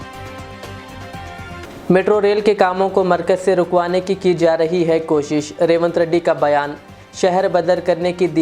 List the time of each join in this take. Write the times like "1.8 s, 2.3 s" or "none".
1.6 s